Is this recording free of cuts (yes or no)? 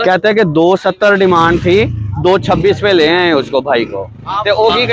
yes